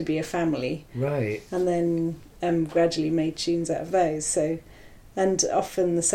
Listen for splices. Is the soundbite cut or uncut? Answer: uncut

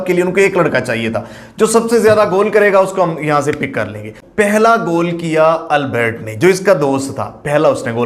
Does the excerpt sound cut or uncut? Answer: cut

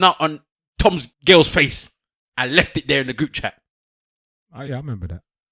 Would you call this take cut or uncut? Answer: cut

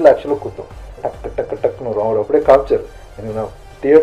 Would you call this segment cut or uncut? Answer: cut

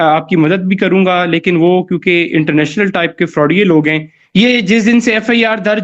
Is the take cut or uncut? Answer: cut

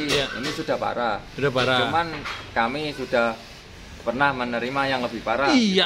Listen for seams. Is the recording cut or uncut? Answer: uncut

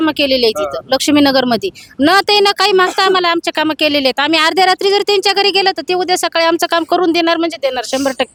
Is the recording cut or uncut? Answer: uncut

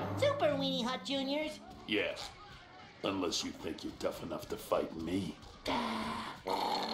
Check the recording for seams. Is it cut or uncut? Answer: uncut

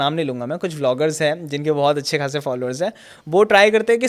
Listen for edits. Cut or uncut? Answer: uncut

